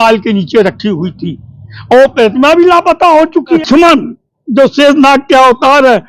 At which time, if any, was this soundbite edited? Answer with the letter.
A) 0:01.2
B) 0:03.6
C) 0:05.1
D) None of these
B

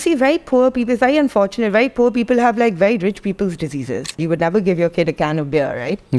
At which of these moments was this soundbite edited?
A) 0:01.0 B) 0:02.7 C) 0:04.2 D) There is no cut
C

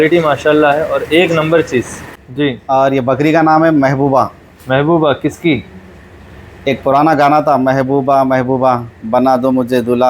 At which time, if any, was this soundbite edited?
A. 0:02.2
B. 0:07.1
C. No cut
A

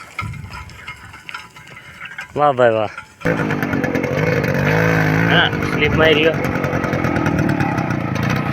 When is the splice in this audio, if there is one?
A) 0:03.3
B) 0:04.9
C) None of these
A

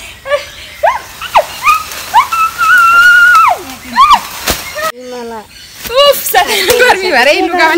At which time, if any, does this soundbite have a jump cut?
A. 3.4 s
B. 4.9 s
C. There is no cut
C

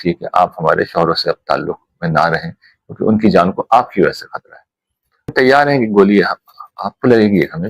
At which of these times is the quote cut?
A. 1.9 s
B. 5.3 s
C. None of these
B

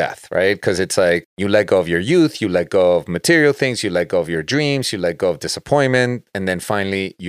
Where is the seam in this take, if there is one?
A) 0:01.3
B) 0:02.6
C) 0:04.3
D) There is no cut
A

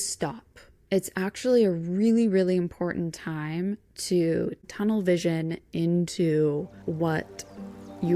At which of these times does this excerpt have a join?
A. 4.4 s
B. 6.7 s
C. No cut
B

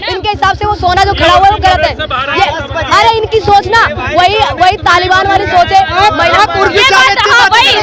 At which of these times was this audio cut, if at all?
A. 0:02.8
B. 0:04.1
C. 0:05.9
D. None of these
D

